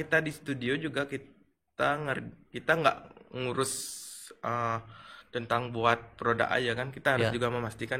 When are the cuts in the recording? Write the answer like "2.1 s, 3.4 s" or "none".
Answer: none